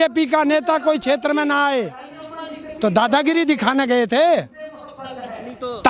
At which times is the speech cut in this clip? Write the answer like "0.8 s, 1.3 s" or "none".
none